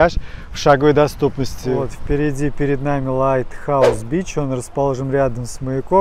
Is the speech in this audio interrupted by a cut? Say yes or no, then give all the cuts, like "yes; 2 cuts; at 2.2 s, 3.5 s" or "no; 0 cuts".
yes; 1 cut; at 1.9 s